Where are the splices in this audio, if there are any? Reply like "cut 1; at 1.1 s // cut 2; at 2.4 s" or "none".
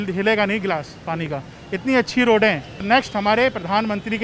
cut 1; at 2.8 s